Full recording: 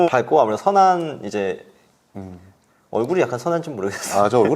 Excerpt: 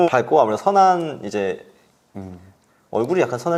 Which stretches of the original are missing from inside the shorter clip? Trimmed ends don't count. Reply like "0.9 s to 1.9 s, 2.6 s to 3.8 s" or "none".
none